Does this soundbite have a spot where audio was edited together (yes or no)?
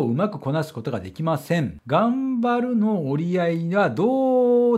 yes